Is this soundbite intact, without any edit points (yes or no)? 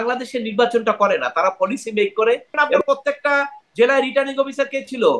no